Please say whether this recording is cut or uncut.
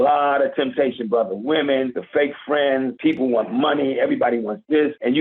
uncut